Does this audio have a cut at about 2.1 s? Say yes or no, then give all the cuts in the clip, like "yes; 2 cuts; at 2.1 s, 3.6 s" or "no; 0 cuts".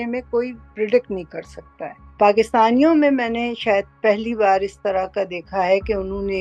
yes; 1 cut; at 2.1 s